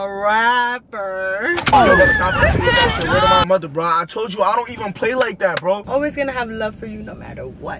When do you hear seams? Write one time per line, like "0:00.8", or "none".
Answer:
0:05.8

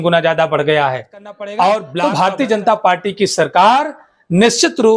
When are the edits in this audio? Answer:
0:01.9

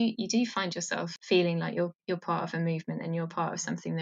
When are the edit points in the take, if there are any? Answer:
0:01.1

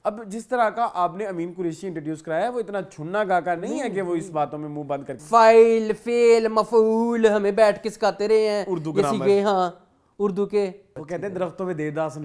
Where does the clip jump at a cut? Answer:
0:05.2
0:10.9

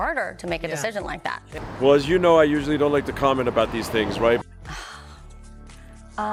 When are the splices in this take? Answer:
none

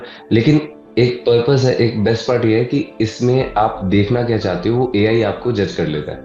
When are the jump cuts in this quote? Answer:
none

